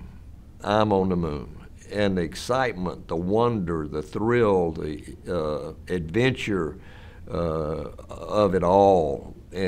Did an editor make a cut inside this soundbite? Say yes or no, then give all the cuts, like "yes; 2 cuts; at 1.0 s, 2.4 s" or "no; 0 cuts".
no; 0 cuts